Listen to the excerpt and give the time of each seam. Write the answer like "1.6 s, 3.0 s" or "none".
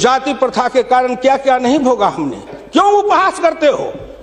2.5 s

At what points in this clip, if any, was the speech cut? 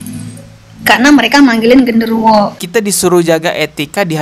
2.6 s

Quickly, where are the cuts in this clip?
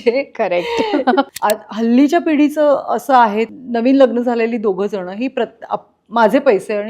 1.3 s, 3.6 s

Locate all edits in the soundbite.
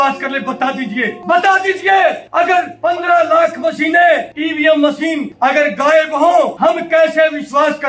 1.2 s, 2.5 s, 4.4 s, 5.3 s, 6.5 s

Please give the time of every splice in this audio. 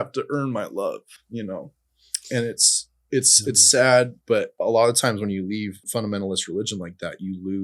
4.5 s, 5.8 s

